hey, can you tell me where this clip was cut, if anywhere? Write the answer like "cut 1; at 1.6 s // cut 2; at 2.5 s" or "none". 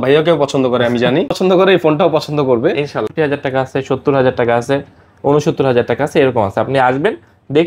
cut 1; at 1.3 s // cut 2; at 3.1 s